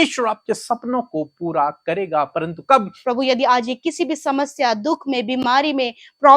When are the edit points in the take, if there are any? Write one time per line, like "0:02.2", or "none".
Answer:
0:03.0